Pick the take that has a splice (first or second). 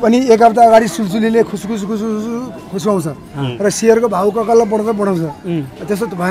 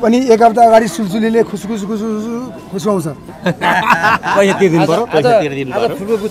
second